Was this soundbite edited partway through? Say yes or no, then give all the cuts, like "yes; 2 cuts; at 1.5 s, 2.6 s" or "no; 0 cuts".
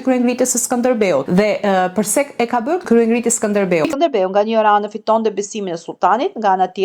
yes; 1 cut; at 3.9 s